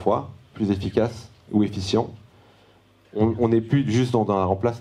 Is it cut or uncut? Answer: uncut